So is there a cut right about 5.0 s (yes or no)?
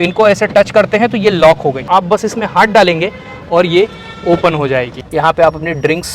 yes